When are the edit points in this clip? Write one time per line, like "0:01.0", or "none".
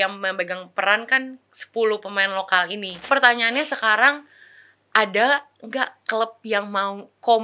0:03.1